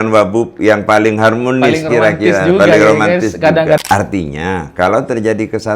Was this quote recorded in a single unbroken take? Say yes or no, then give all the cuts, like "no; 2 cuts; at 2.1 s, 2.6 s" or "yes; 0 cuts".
no; 1 cut; at 3.8 s